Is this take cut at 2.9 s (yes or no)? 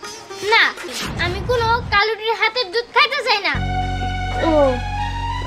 no